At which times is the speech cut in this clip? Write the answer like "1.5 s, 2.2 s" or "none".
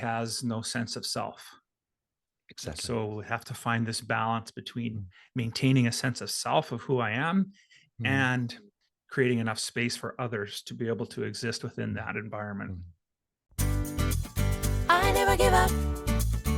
13.4 s